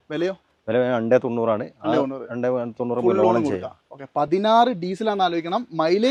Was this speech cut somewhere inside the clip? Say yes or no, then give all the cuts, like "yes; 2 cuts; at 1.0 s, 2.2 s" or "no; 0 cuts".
no; 0 cuts